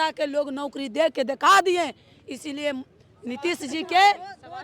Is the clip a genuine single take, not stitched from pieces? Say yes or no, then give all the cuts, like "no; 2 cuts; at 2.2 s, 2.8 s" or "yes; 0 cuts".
yes; 0 cuts